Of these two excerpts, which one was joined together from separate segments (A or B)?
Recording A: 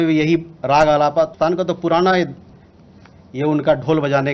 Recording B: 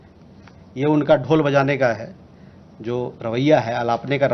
A